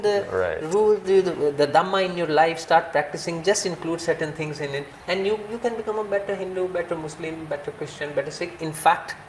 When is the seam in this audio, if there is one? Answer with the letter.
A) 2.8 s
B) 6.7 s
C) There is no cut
C